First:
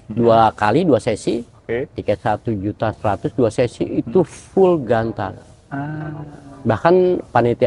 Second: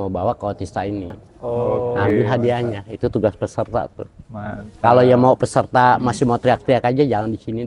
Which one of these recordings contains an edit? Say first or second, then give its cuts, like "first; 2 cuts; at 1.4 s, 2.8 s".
second; 1 cut; at 2.1 s